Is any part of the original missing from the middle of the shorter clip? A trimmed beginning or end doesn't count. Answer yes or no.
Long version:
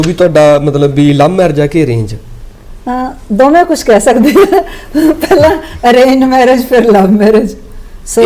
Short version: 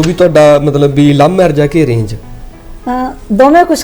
no